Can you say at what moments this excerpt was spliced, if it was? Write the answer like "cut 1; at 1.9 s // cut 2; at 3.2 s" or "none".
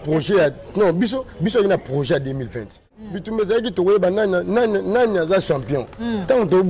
cut 1; at 2.9 s